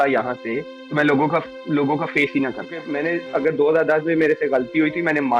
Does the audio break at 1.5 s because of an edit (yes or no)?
no